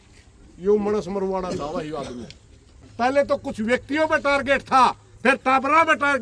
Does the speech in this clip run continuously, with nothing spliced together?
no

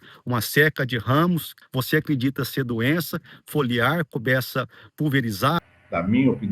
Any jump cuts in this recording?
yes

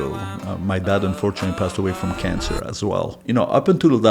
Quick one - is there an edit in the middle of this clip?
yes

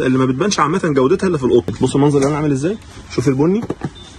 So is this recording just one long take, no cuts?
no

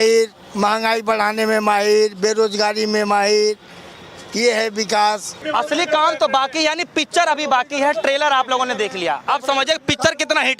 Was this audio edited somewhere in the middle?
yes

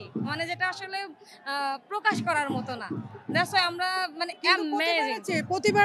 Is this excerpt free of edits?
yes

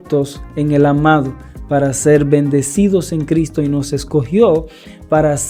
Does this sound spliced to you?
no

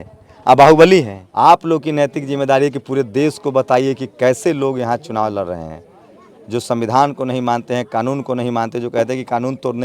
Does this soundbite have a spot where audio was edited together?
yes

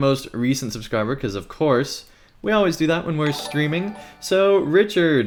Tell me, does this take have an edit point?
no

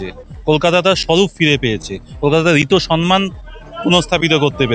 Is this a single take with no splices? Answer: yes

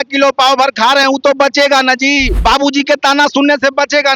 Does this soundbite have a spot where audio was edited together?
yes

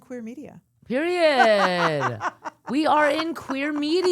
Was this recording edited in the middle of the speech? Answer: no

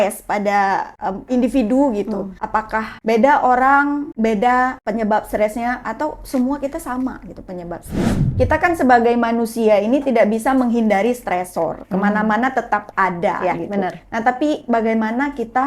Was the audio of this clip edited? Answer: yes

